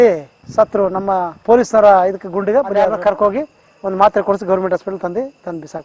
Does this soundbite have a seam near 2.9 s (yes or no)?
yes